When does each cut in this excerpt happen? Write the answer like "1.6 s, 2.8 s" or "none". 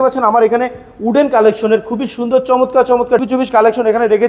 3.2 s